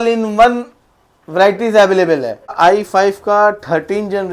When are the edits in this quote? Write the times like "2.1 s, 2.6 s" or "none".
2.5 s